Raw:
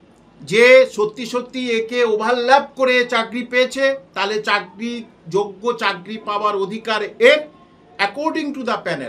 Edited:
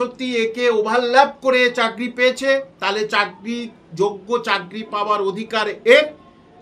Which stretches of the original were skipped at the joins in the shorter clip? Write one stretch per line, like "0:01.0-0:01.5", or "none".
none